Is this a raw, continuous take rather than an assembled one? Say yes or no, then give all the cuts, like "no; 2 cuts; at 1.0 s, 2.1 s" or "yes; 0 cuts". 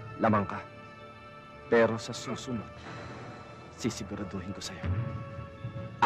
yes; 0 cuts